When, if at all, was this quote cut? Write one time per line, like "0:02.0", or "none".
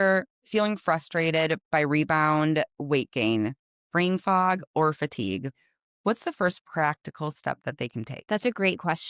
0:08.1